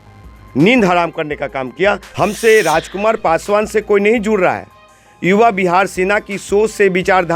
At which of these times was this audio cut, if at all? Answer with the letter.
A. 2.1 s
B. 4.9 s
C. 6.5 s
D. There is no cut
A